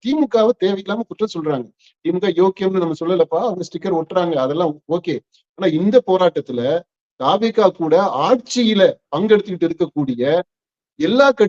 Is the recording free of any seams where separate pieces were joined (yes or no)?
yes